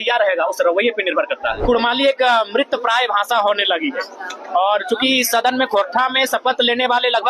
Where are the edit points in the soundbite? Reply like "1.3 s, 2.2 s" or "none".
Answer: 1.6 s